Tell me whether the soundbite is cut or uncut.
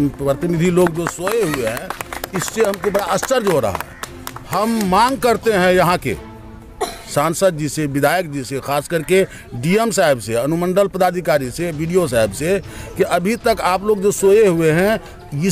uncut